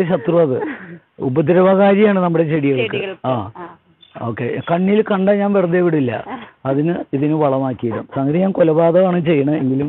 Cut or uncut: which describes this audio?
uncut